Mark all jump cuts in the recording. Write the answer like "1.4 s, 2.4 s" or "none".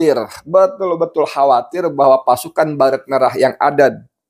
none